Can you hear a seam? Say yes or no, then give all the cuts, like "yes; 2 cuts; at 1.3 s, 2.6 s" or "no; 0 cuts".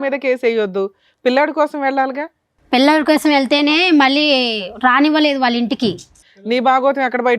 yes; 1 cut; at 6.2 s